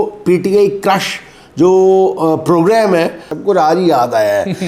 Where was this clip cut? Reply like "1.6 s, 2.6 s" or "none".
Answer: 3.3 s